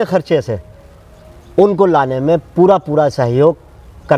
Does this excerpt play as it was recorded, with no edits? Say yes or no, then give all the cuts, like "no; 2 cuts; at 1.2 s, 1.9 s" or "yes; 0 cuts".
yes; 0 cuts